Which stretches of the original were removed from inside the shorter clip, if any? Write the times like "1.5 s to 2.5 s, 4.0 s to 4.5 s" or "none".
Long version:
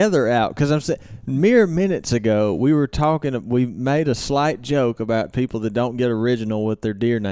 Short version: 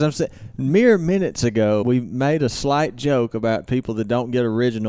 2.5 s to 3.5 s